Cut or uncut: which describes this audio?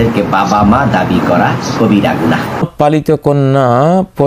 cut